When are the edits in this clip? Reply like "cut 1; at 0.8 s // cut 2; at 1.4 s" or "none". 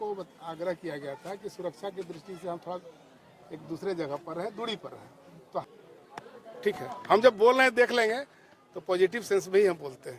cut 1; at 5.6 s